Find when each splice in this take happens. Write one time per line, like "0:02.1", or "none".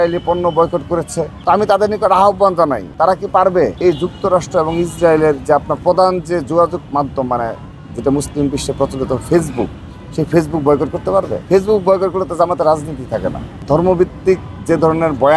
0:01.3
0:02.8
0:03.8
0:11.4
0:13.5